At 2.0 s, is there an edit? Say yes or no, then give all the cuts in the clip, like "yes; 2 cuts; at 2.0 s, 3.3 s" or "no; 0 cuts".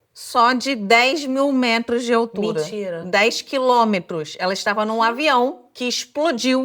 no; 1 cut; at 5.7 s